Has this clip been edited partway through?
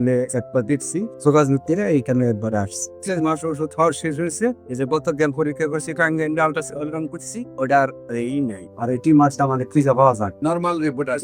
yes; 2 cuts; at 1.1 s, 3.0 s

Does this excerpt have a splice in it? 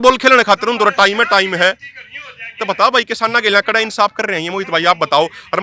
no; 0 cuts

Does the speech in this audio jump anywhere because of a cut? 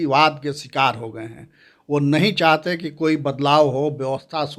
no; 0 cuts

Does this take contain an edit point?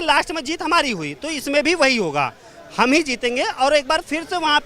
no; 0 cuts

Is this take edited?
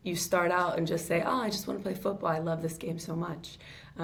no; 0 cuts

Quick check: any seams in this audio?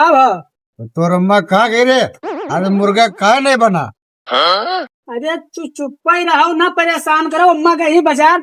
no; 0 cuts

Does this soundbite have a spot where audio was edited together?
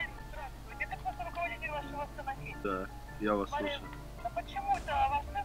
yes; 2 cuts; at 2.5 s, 4.2 s

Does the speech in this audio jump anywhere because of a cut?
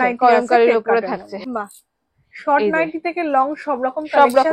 yes; 1 cut; at 1.3 s

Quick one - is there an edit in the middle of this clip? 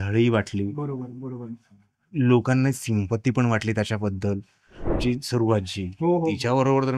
yes; 1 cut; at 5.0 s

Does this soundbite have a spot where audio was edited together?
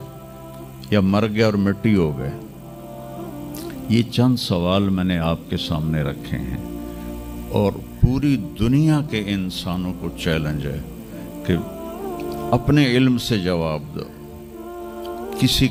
no; 0 cuts

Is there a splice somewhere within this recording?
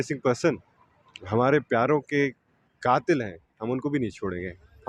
no; 0 cuts

